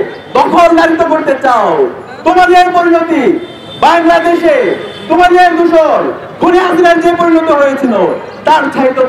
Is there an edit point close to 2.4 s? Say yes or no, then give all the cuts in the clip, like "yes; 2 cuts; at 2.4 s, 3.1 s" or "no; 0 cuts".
no; 0 cuts